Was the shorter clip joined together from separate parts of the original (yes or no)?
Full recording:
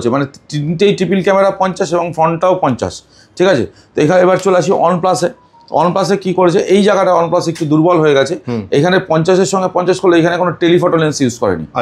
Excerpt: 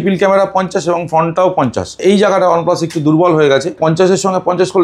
yes